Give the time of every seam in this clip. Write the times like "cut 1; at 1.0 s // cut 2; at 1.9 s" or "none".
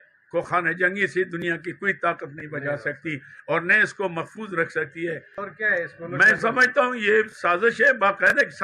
cut 1; at 5.3 s

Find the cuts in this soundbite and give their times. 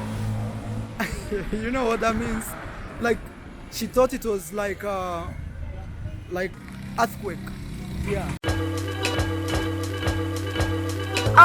cut 1; at 6.5 s // cut 2; at 8.4 s

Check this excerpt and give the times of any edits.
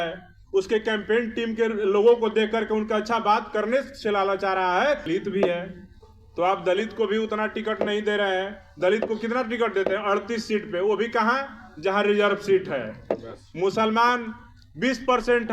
cut 1; at 5.1 s

